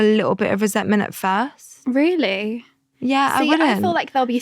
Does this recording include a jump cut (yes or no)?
no